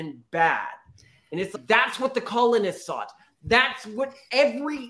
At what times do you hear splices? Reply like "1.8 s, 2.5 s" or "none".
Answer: none